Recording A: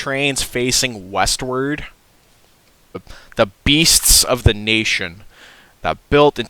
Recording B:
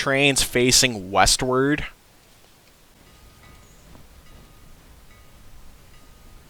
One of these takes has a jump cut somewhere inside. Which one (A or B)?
A